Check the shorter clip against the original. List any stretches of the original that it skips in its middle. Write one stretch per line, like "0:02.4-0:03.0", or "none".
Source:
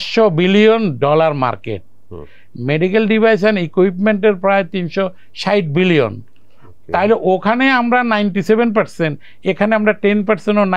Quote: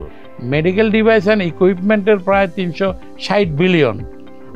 none